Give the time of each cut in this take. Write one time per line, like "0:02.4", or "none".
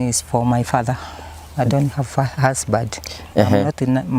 0:03.2